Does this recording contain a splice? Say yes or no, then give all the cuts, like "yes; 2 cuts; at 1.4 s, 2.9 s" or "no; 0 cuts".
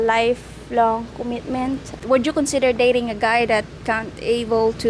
yes; 1 cut; at 2.0 s